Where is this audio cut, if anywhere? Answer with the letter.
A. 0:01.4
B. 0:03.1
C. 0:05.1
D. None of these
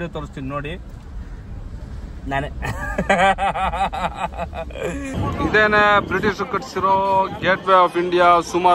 C